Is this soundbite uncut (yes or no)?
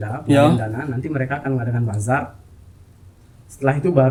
yes